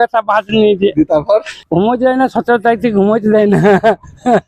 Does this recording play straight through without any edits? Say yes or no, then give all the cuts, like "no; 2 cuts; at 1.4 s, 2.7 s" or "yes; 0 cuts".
no; 1 cut; at 1.6 s